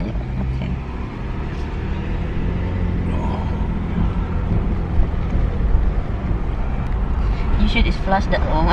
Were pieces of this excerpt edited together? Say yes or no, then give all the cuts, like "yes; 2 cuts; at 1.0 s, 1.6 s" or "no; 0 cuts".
no; 0 cuts